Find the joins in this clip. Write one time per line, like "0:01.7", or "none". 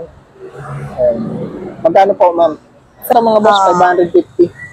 0:03.1